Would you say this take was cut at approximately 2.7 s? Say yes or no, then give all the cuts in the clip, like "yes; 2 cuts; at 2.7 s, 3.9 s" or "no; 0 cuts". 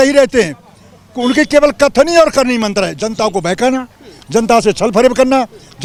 no; 0 cuts